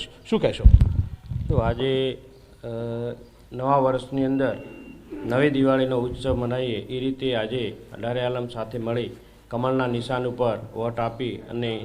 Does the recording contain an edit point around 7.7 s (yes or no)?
yes